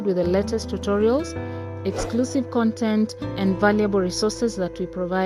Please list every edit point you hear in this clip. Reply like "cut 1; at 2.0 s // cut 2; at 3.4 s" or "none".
none